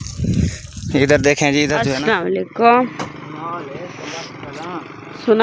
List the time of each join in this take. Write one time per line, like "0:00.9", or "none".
0:02.5